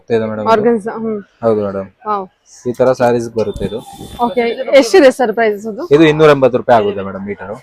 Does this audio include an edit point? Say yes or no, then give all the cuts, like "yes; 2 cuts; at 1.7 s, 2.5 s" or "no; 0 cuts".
no; 0 cuts